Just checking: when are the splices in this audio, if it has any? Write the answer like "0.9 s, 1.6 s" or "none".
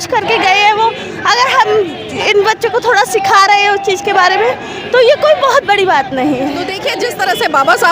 6.4 s